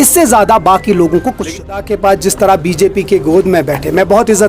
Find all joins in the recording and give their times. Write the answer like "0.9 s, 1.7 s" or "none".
1.7 s